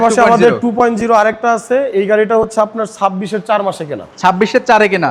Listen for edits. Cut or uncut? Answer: uncut